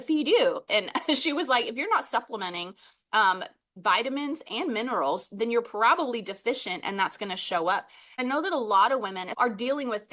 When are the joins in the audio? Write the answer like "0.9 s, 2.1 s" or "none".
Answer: 8.2 s, 9.2 s